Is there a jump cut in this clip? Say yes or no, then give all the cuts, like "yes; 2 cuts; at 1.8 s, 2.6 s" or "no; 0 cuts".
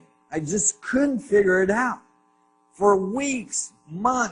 no; 0 cuts